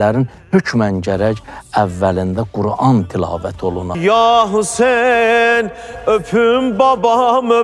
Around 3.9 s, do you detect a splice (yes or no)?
yes